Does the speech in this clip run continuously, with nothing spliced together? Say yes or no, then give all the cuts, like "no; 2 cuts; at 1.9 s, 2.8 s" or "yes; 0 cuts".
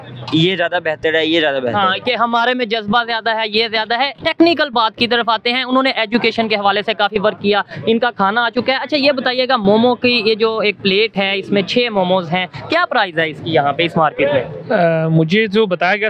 yes; 0 cuts